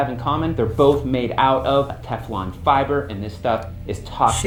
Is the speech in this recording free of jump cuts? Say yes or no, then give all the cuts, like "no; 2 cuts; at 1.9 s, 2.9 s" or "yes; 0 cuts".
yes; 0 cuts